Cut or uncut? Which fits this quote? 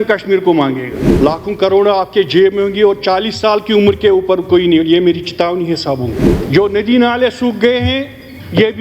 cut